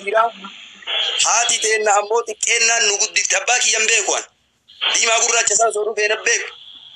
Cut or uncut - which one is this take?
uncut